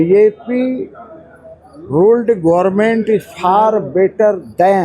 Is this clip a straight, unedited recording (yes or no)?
yes